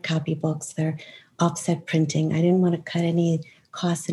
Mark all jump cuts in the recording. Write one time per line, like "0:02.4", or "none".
none